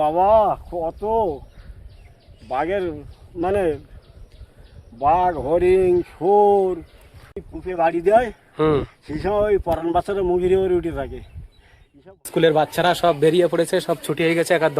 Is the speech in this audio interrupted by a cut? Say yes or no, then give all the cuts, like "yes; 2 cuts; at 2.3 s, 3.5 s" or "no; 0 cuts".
yes; 2 cuts; at 7.4 s, 12.3 s